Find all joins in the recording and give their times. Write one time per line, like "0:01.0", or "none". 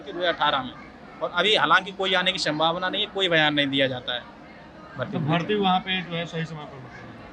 none

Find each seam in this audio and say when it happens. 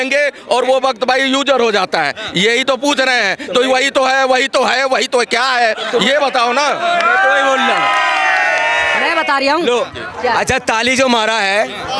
none

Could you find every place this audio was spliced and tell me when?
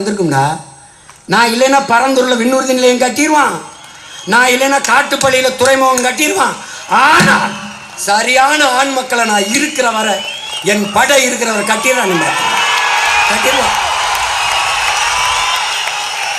none

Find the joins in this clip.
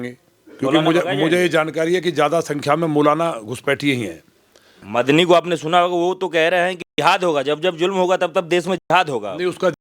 0:04.8

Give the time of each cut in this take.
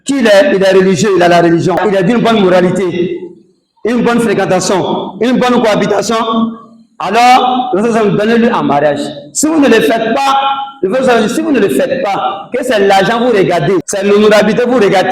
0:01.8
0:13.9

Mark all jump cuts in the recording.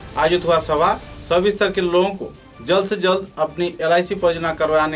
none

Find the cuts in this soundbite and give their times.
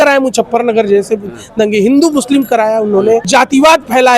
0:03.3

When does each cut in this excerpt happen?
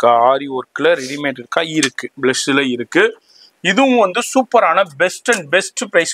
none

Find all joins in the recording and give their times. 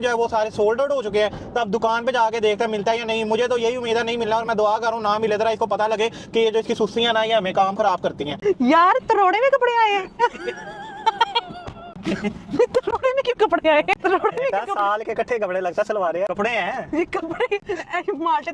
0:08.3

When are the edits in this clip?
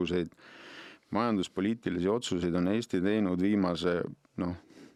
none

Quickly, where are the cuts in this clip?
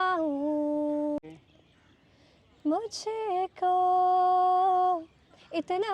0:01.2

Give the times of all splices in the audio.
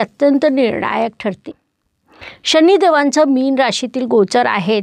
0:01.4

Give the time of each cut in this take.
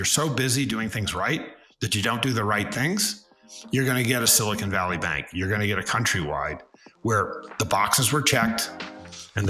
none

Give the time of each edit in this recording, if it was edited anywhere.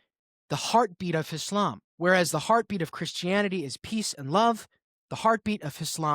0:01.8

